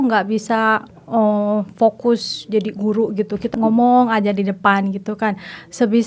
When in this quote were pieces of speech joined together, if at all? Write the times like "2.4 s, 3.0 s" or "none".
0.9 s, 3.5 s